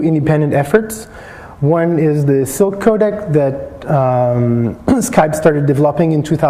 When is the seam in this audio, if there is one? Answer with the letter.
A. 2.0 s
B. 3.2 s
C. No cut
B